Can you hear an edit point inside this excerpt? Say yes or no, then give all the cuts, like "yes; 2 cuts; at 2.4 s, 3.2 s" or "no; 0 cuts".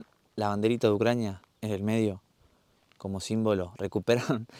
no; 0 cuts